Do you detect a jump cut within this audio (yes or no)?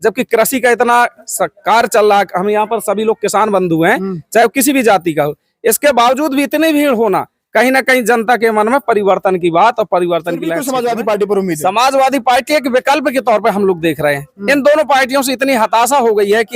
yes